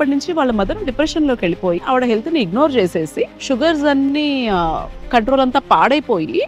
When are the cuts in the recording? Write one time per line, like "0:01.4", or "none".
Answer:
0:01.8